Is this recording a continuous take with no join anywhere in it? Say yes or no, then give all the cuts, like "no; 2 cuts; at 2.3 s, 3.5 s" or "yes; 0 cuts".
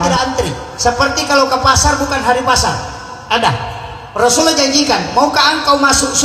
yes; 0 cuts